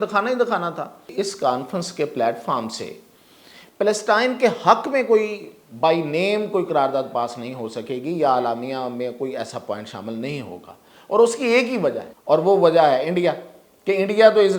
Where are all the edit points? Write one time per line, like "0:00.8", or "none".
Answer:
0:01.0
0:12.1